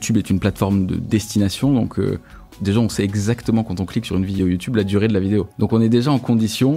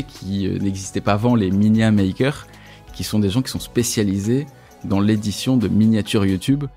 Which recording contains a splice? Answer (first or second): first